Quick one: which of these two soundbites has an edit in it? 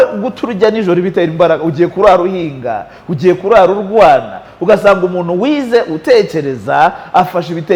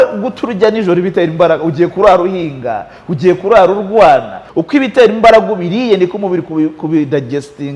second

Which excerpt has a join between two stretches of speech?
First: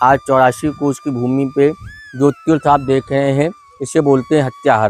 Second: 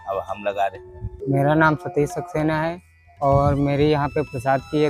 second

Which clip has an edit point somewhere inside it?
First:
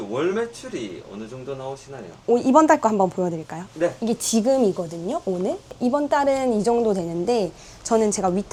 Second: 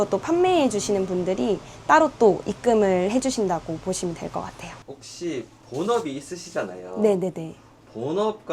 second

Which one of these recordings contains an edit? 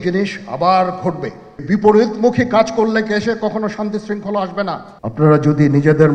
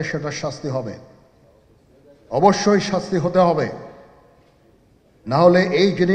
first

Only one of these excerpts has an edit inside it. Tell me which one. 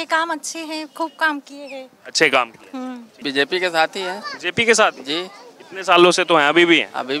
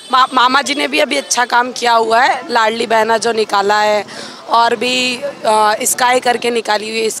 first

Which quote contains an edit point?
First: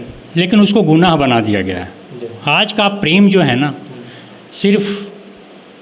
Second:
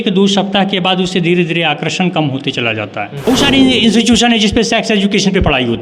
second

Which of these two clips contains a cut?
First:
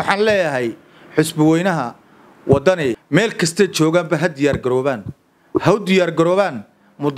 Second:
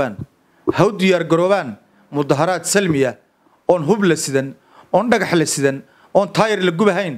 first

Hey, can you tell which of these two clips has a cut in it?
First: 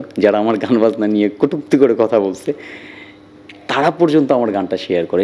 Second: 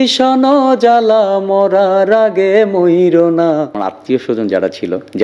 second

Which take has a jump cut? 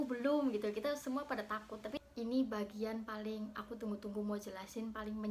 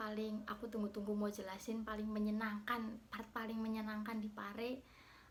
first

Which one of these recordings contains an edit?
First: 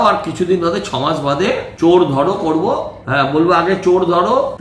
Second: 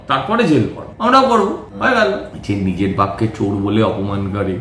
second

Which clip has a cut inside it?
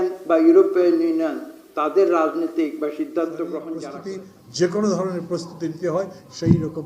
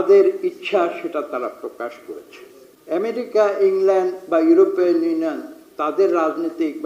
first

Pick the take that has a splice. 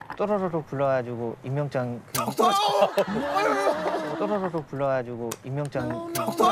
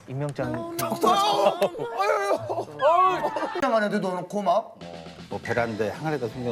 second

